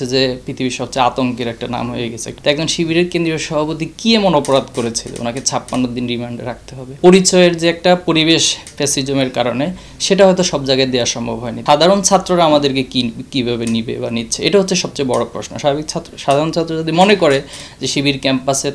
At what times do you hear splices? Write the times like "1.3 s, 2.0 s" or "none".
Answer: 2.2 s, 7.0 s, 11.6 s